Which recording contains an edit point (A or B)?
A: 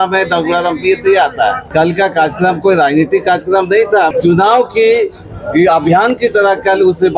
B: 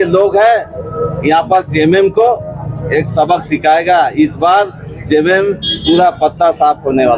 A